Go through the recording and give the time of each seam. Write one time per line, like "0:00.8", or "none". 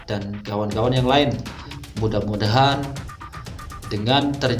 0:01.8